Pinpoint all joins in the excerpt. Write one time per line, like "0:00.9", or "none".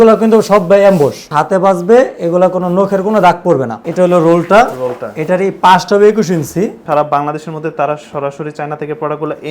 0:01.3
0:03.8
0:06.8